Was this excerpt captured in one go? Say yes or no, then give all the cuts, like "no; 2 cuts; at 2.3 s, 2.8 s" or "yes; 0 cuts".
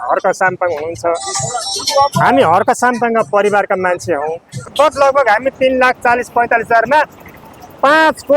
no; 1 cut; at 4.7 s